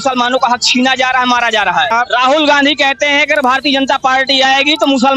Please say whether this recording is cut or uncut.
cut